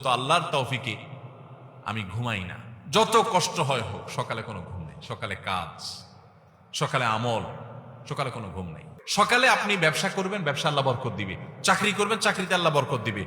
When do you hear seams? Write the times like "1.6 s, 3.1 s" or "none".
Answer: 8.9 s